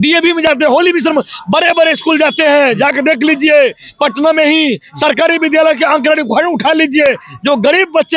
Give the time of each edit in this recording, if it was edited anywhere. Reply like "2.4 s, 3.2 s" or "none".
none